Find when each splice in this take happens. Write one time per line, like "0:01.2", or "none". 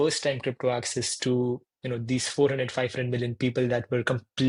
none